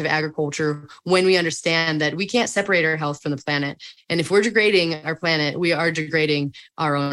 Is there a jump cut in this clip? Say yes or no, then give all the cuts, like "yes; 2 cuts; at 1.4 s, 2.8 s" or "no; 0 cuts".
no; 0 cuts